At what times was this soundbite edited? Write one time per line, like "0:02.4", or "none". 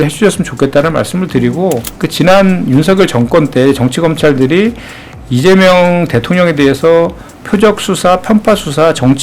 0:02.0